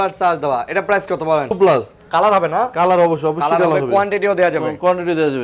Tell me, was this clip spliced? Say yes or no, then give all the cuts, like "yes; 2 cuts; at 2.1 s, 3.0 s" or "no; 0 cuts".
yes; 1 cut; at 1.5 s